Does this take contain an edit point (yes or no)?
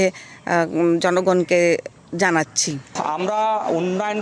yes